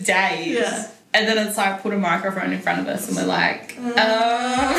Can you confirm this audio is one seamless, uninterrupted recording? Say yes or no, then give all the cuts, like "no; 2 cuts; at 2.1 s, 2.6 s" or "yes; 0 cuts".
no; 1 cut; at 0.9 s